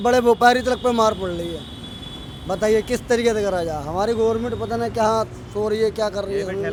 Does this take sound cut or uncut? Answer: uncut